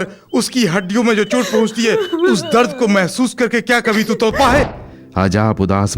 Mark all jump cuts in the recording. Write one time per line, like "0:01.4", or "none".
0:04.8